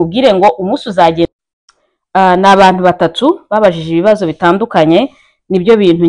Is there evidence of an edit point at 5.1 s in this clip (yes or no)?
no